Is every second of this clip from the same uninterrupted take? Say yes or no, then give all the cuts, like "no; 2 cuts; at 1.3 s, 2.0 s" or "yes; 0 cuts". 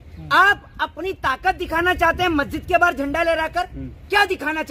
yes; 0 cuts